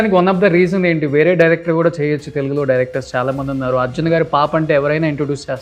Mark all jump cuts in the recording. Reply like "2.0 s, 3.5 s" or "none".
none